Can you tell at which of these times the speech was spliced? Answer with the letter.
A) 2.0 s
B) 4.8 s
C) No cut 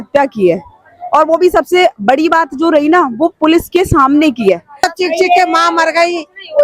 B